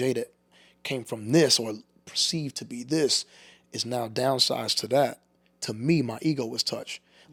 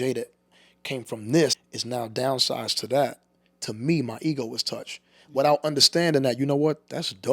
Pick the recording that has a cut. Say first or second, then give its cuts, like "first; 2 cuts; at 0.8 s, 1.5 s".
second; 1 cut; at 1.6 s